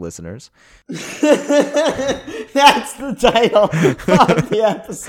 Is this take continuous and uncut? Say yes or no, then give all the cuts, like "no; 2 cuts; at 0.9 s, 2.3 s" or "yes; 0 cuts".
no; 1 cut; at 1.1 s